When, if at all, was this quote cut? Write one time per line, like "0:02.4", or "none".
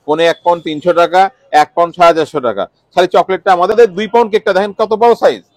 0:03.7